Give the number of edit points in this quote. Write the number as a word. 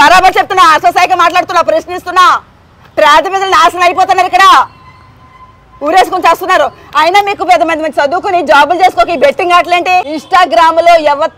one